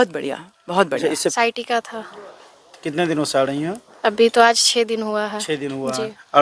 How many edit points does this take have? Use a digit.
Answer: 1